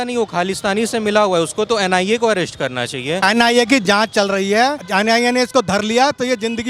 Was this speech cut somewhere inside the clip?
yes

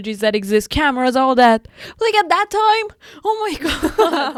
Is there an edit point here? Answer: no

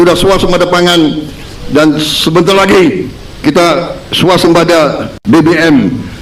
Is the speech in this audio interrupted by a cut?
no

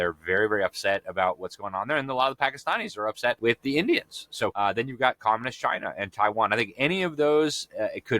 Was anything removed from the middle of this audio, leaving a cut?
yes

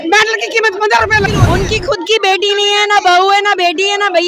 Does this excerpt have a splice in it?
yes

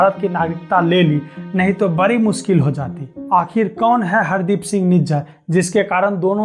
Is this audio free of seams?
yes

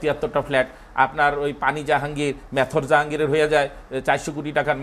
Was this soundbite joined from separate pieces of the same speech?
no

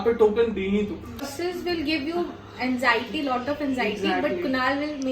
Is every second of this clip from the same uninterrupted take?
no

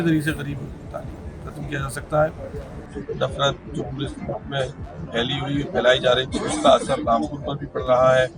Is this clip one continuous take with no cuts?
no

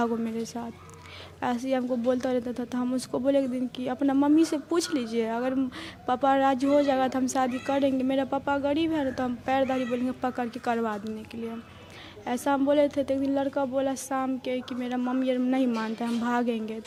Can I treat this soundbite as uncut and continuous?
yes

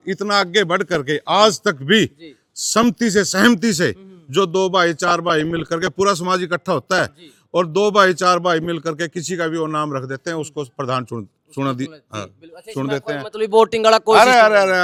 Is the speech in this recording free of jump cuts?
yes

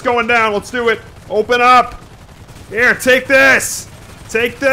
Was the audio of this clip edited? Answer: no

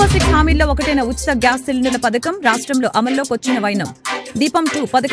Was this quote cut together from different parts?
no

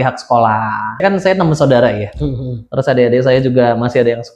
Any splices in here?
yes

